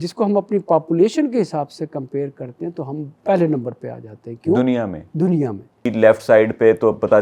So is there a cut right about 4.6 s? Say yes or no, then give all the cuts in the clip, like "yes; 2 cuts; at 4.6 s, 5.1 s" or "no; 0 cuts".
no; 2 cuts; at 3.1 s, 5.9 s